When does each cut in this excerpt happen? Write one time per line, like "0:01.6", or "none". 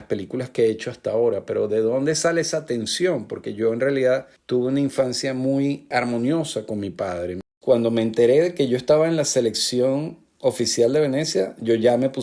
0:07.5